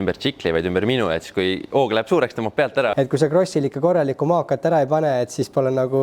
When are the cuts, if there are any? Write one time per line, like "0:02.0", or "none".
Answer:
0:02.9